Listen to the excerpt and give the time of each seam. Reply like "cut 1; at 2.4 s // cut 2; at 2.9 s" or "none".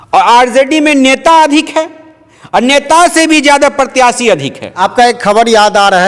none